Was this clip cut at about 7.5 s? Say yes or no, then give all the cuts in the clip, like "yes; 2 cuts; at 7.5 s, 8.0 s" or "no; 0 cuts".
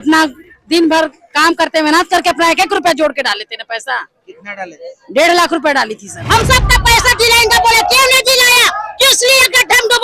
no; 1 cut; at 6.2 s